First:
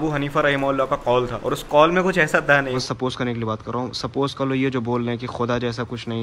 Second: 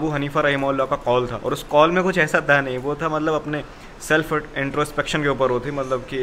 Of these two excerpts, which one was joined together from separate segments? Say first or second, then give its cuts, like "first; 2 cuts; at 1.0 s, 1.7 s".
first; 1 cut; at 2.8 s